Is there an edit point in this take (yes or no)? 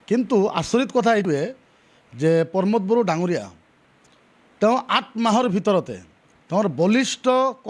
yes